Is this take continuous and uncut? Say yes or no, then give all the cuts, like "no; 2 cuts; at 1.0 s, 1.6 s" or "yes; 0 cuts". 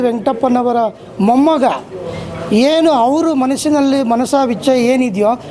yes; 0 cuts